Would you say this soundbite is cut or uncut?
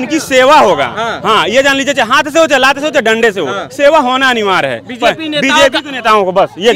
uncut